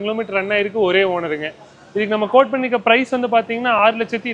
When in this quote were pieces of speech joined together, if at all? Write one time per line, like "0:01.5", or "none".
none